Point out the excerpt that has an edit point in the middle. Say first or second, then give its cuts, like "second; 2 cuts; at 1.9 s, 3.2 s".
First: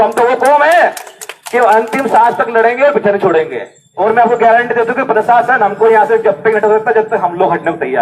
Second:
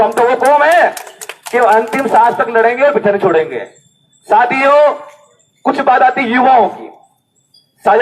first; 1 cut; at 3.9 s